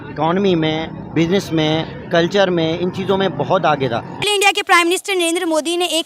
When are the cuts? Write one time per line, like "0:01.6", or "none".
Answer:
0:04.3